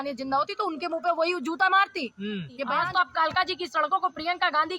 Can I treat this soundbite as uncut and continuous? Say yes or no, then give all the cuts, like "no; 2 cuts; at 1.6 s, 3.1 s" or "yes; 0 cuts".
no; 1 cut; at 2.6 s